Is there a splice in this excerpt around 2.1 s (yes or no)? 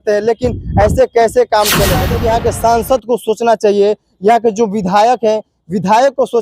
yes